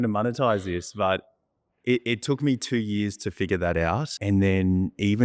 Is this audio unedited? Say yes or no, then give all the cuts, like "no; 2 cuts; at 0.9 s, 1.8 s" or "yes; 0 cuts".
no; 1 cut; at 4.2 s